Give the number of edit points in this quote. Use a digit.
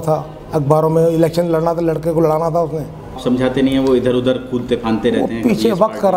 1